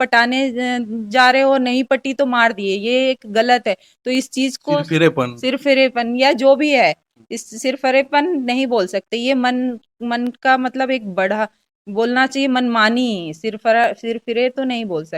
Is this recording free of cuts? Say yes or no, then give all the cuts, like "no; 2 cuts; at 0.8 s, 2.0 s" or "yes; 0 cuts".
yes; 0 cuts